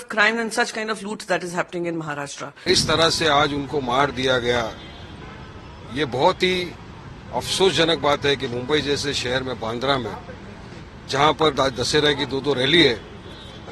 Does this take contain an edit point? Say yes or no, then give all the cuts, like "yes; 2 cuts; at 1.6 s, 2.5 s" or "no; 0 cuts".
yes; 1 cut; at 2.7 s